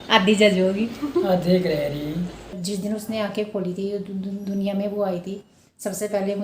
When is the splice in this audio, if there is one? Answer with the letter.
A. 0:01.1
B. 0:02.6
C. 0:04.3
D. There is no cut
B